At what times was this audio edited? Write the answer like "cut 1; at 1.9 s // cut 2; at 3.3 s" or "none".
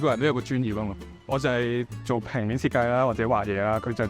cut 1; at 1.9 s